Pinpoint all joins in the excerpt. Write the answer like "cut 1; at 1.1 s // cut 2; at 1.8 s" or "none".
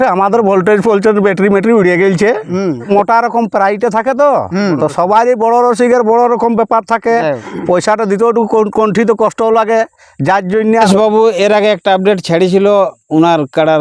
cut 1; at 2.9 s // cut 2; at 10.8 s